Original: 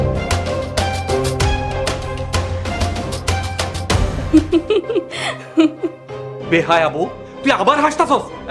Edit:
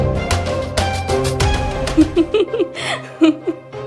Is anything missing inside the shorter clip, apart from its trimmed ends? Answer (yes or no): yes